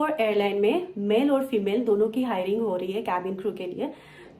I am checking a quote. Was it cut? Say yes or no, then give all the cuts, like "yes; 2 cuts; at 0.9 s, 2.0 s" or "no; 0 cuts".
no; 0 cuts